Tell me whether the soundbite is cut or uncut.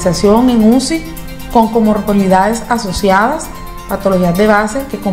uncut